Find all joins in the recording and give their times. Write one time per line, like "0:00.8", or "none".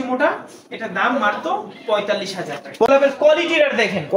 0:02.9